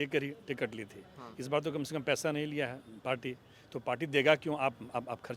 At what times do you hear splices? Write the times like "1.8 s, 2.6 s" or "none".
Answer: none